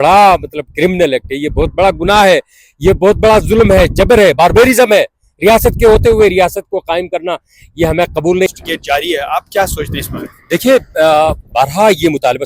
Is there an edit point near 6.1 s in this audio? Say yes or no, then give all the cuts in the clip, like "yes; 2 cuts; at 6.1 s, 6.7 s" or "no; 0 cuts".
no; 1 cut; at 8.5 s